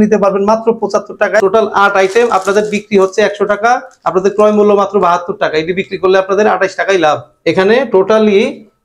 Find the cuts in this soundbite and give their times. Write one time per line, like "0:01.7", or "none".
0:07.3